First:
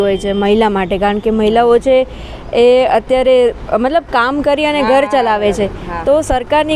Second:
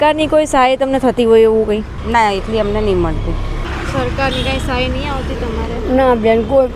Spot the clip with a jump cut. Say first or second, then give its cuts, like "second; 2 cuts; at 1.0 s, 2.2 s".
second; 2 cuts; at 1.9 s, 3.6 s